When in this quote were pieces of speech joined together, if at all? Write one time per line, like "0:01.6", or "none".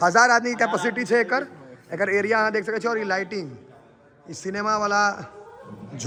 none